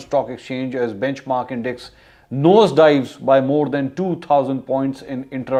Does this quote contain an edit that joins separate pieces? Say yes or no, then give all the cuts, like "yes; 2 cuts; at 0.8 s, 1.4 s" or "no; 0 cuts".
no; 0 cuts